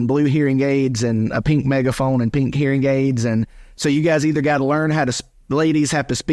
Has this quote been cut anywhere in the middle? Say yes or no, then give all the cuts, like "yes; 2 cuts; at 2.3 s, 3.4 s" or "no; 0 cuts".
yes; 1 cut; at 2.5 s